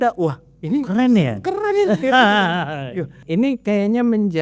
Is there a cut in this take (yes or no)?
yes